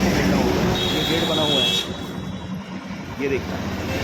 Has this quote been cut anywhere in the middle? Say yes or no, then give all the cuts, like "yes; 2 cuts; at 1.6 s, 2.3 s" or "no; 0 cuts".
no; 0 cuts